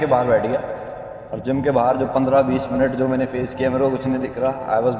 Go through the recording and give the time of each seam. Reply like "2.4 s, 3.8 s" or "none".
none